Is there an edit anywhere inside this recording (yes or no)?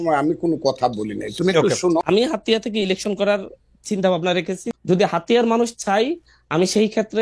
yes